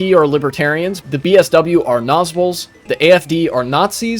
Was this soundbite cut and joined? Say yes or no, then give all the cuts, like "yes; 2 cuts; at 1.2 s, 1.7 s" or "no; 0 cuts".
yes; 2 cuts; at 1.0 s, 2.9 s